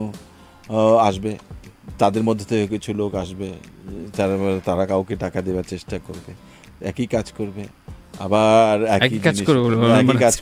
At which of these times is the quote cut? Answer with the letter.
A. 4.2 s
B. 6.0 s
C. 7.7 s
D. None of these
D